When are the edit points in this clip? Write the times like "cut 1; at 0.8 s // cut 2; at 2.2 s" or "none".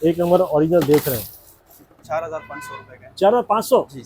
cut 1; at 2.0 s